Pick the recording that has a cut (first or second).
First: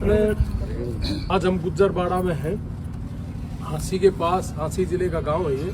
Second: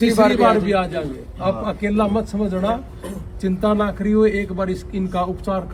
first